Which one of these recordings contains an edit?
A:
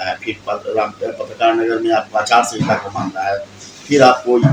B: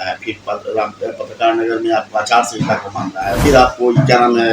B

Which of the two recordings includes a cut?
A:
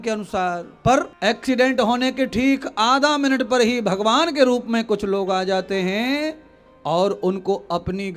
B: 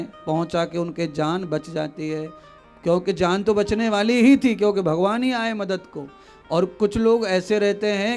A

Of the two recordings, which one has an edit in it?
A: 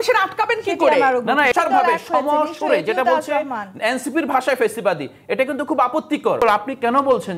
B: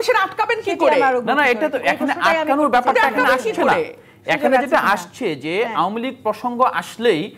A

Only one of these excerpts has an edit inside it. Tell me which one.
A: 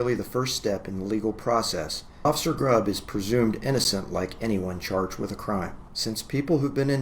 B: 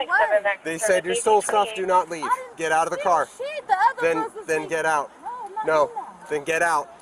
A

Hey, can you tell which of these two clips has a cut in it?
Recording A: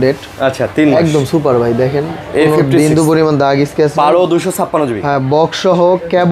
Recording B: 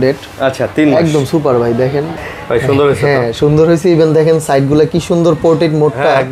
B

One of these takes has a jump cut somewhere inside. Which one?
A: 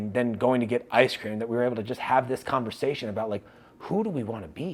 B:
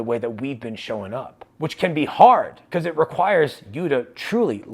B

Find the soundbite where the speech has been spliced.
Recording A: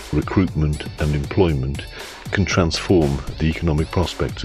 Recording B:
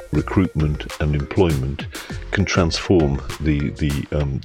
A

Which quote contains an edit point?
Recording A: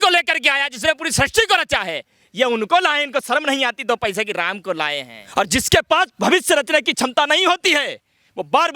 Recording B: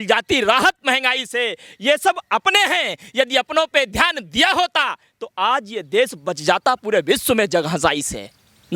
A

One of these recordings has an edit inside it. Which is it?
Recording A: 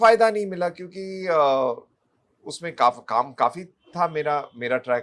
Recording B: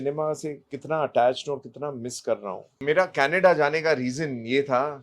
B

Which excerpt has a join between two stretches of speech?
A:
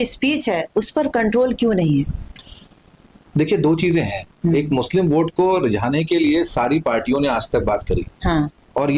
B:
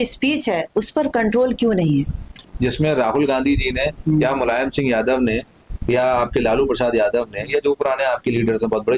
B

